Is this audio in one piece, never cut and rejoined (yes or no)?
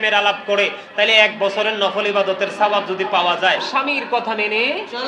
no